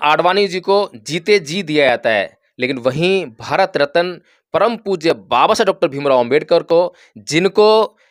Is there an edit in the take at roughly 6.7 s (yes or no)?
no